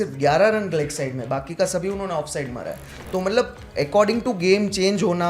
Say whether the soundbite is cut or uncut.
uncut